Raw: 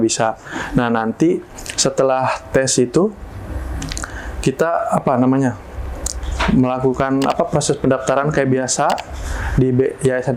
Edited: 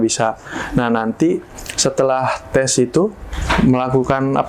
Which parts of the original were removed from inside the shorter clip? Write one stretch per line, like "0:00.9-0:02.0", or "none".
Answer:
0:03.3-0:06.2